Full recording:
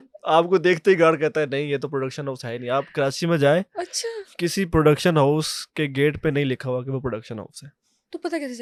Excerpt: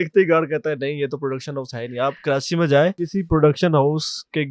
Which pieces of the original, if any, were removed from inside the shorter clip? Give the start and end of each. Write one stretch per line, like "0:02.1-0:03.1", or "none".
0:03.7-0:04.4